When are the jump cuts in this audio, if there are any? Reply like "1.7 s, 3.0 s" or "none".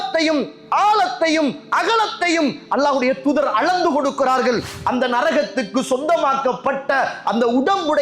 4.7 s